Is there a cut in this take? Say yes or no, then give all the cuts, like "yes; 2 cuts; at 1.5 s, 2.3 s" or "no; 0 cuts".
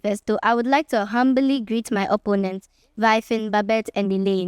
no; 0 cuts